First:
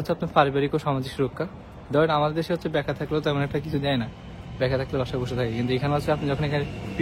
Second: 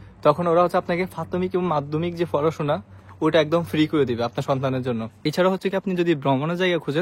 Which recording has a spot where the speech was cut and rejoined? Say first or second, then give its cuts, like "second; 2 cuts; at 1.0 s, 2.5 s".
second; 1 cut; at 5.1 s